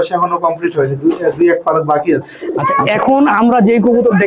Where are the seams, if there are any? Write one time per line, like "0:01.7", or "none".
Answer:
0:02.6